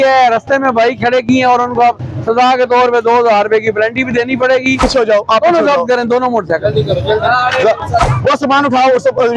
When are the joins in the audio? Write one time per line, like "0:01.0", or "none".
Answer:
0:04.8
0:08.0